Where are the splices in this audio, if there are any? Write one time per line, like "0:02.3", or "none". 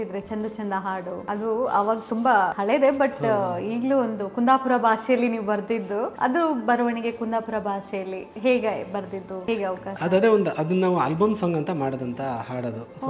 0:01.2
0:02.6
0:06.1
0:09.3